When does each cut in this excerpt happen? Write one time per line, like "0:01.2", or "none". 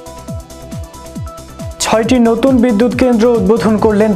0:01.8